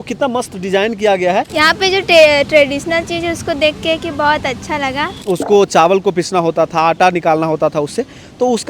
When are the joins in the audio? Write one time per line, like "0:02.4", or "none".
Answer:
0:01.5
0:05.2